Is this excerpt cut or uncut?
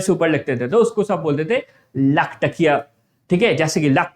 uncut